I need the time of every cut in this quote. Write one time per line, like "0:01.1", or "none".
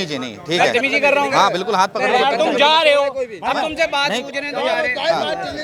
none